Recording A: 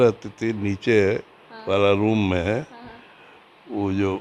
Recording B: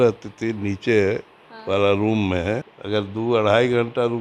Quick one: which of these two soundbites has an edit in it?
B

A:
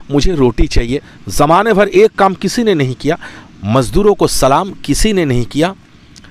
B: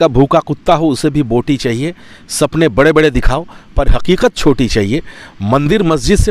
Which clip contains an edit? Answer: A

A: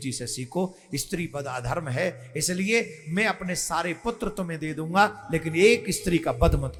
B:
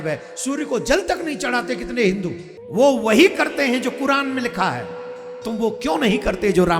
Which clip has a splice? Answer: B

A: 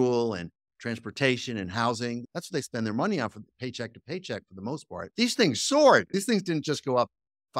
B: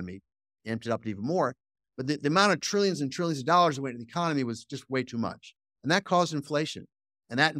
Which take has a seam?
A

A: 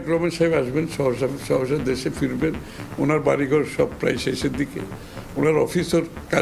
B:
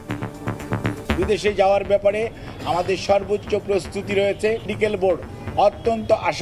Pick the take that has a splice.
B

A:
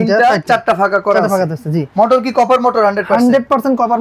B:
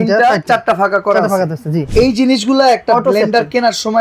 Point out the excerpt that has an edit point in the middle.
B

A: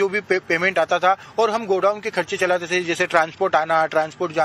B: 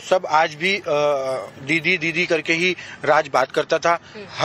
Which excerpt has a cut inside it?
A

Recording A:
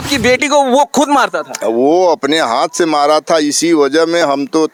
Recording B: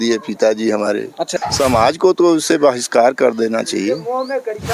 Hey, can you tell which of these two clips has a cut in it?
B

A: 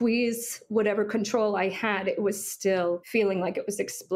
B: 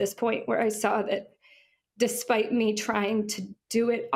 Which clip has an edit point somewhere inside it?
A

